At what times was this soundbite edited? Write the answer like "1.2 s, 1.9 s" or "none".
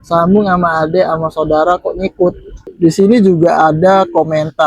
2.6 s